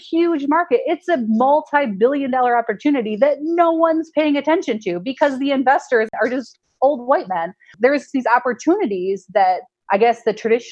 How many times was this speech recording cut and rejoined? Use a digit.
3